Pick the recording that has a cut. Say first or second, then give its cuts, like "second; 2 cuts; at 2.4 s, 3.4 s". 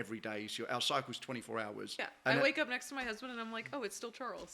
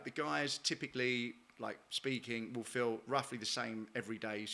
first; 1 cut; at 2.1 s